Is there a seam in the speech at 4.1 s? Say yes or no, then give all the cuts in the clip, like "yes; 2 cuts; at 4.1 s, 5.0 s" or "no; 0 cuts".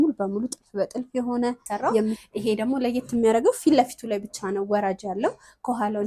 no; 1 cut; at 2.2 s